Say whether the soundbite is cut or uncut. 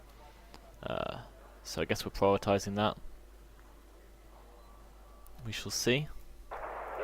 cut